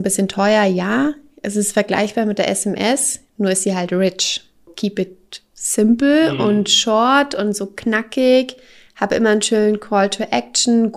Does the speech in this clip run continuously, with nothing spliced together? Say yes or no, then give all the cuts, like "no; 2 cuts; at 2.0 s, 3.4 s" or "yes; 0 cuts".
no; 1 cut; at 4.7 s